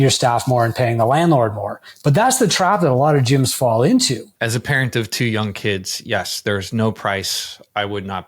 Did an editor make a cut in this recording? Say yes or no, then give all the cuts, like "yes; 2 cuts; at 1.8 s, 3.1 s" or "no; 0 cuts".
yes; 1 cut; at 4.2 s